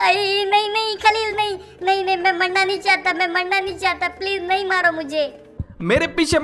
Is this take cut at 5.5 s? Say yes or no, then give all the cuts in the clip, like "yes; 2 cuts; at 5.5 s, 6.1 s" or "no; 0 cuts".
yes; 1 cut; at 5.5 s